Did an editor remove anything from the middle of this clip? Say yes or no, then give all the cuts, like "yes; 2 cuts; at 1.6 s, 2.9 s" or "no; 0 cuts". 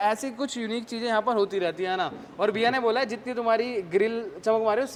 no; 0 cuts